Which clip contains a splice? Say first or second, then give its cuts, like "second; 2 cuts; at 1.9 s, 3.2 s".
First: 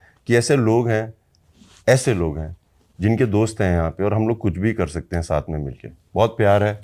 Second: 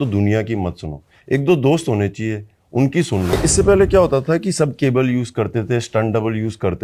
second; 1 cut; at 3.3 s